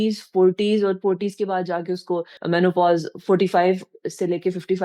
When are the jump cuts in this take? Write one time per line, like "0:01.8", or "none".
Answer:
none

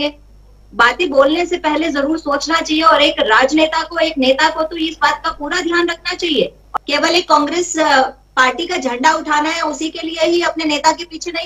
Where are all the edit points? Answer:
0:06.6

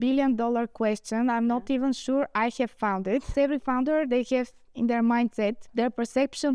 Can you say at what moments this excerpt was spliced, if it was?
0:03.3
0:05.7

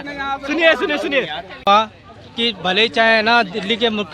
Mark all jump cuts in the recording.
0:01.7

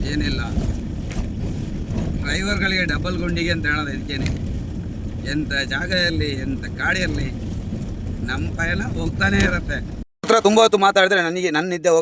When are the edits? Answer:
0:10.1

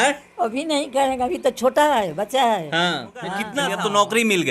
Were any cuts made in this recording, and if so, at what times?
0:03.4

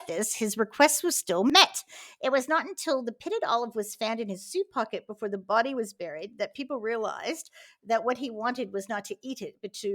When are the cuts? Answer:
0:01.3

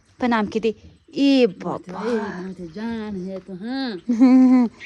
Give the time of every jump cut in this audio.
none

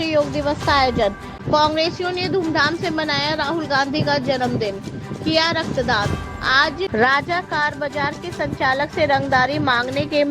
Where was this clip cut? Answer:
0:01.3
0:06.9

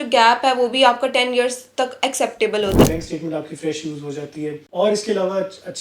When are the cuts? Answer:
0:02.9
0:04.7

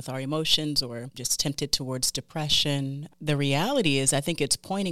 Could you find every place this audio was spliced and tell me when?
0:01.2
0:03.0

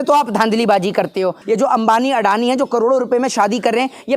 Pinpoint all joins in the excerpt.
0:01.4

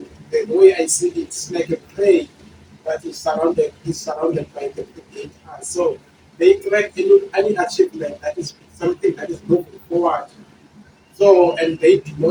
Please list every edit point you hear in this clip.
none

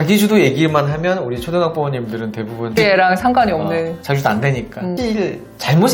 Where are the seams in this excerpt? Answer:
0:02.8
0:04.9

